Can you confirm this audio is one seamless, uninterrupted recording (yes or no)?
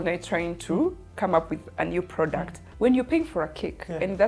no